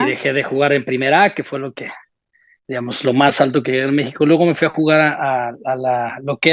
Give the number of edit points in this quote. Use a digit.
0